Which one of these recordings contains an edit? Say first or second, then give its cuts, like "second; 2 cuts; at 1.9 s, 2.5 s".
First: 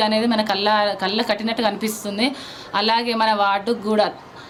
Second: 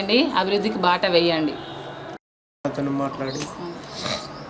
second; 1 cut; at 2.5 s